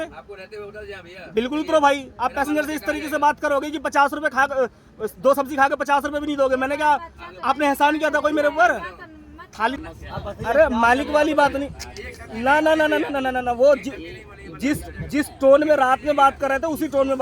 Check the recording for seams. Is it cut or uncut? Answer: cut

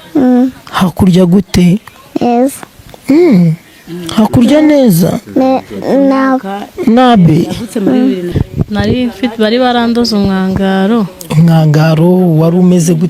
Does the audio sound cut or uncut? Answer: cut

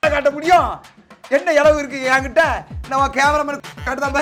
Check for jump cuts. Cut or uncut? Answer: uncut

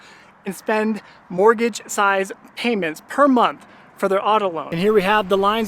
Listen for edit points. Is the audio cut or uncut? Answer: cut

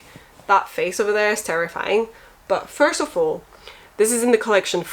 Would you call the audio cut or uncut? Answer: uncut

